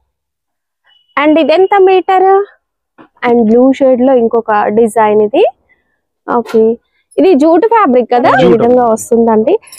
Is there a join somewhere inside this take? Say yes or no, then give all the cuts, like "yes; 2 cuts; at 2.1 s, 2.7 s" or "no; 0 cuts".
yes; 2 cuts; at 3.2 s, 8.4 s